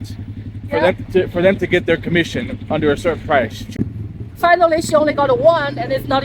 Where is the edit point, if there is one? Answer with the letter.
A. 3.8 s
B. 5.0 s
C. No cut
A